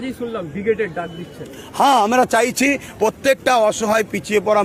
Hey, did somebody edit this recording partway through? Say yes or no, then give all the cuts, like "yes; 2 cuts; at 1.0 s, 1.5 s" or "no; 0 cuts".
no; 0 cuts